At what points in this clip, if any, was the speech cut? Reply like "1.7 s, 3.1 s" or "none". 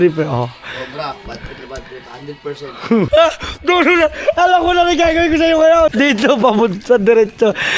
3.1 s, 5.9 s